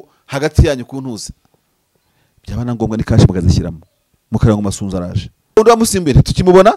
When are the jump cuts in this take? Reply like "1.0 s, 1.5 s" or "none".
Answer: 5.6 s